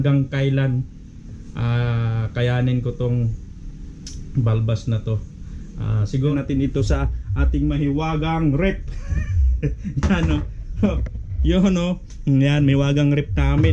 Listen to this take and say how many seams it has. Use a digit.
1